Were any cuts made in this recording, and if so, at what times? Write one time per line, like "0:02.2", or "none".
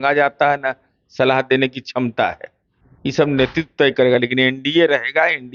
none